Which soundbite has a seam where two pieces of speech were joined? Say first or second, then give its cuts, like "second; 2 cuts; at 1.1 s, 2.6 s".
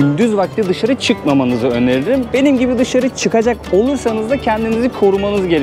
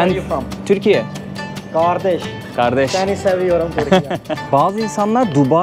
second; 1 cut; at 4.3 s